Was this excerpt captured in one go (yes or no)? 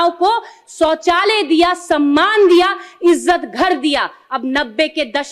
yes